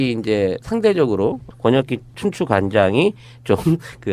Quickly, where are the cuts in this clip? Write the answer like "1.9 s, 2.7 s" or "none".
1.7 s